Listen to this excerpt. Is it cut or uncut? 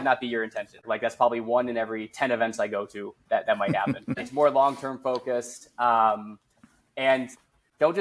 cut